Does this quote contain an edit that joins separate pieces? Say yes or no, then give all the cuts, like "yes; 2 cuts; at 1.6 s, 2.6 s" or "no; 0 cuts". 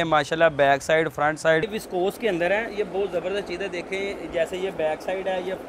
yes; 1 cut; at 1.6 s